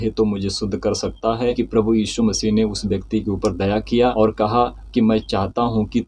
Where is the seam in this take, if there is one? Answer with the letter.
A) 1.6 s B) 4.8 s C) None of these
A